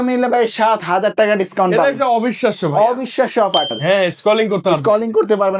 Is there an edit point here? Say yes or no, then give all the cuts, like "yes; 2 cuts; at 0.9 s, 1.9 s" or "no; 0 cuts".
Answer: yes; 1 cut; at 3.7 s